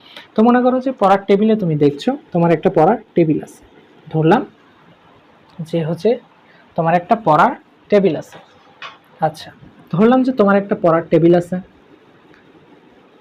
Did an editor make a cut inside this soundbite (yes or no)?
no